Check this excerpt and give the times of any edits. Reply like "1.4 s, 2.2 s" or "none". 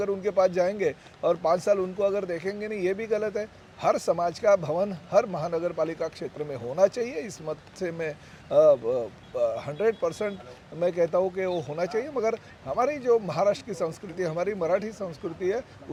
none